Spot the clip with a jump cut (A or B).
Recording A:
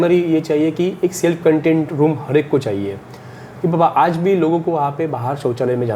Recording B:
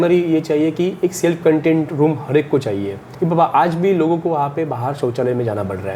B